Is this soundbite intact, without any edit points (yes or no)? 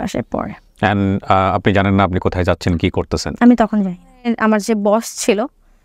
no